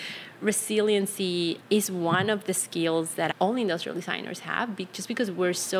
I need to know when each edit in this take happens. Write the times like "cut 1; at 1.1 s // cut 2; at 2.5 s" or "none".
cut 1; at 3.3 s